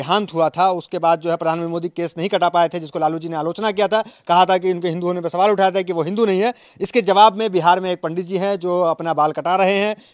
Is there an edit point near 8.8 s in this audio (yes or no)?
no